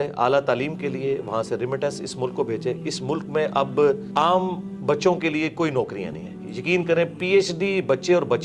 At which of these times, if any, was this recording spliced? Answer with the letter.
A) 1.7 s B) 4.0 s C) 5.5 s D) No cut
B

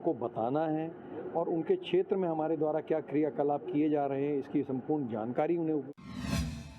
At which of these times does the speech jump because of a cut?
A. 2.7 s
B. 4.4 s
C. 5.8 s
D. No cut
C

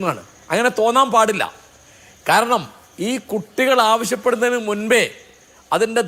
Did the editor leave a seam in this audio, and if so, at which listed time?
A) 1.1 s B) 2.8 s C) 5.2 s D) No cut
D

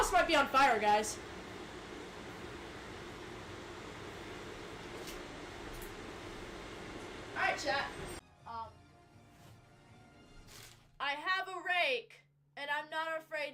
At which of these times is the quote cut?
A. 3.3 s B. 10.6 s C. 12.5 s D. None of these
D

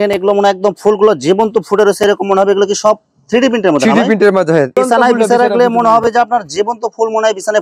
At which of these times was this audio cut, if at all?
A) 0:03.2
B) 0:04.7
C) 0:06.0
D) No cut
D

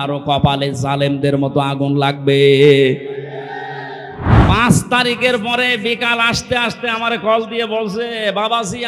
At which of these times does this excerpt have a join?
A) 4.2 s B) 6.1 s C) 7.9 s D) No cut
A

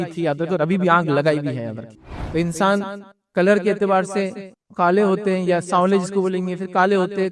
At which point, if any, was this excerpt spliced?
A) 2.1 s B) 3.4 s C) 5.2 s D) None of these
A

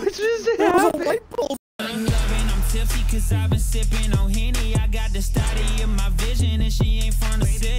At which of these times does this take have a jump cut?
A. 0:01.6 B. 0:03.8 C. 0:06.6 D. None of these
A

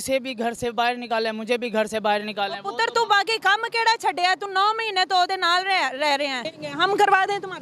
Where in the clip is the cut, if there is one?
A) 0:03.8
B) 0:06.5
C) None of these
B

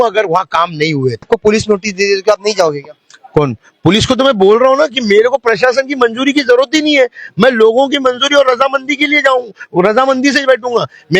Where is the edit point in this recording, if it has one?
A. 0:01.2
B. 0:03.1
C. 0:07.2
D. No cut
A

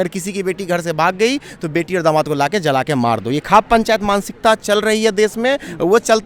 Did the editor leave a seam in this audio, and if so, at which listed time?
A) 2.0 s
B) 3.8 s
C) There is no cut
C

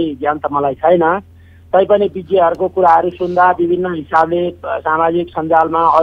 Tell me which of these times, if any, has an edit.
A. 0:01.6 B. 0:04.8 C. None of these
C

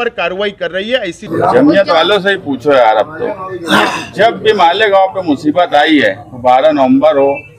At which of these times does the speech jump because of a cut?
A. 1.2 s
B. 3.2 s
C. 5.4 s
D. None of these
A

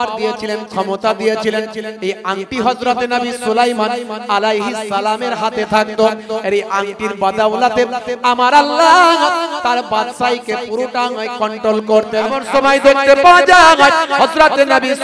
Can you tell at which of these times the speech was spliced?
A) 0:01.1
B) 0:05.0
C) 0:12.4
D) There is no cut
C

